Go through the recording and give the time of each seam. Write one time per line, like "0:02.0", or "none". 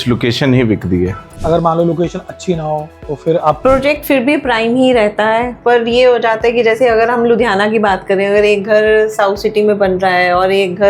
0:01.3
0:03.6